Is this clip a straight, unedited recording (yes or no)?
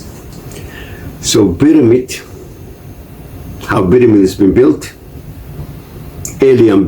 no